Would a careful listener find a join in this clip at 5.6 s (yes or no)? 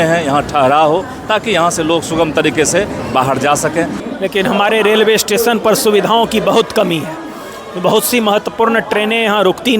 no